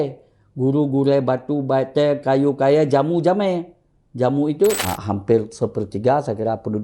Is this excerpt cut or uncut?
cut